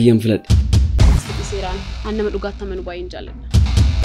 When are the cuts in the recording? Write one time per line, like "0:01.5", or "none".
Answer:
none